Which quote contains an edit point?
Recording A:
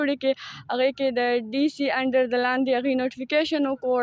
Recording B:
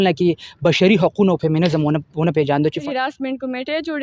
B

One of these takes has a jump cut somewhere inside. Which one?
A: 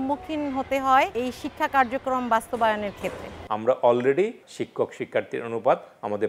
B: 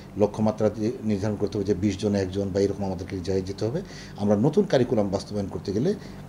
A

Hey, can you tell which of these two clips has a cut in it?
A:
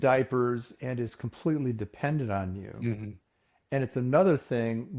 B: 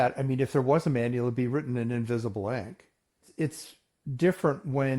B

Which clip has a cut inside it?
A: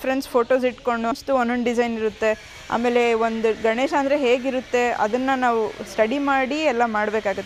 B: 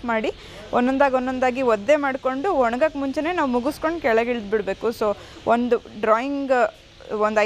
A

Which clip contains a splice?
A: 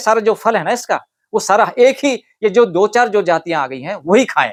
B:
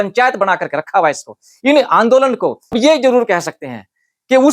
B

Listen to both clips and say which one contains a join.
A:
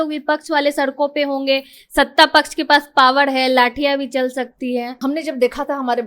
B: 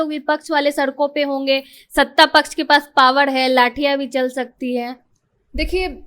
A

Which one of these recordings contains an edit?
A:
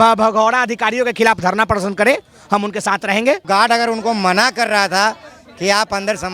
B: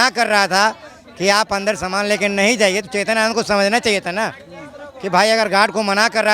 A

